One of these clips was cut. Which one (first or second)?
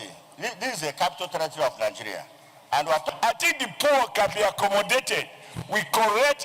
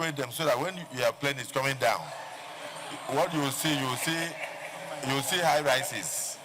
first